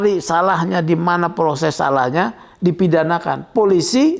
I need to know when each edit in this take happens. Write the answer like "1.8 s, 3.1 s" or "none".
none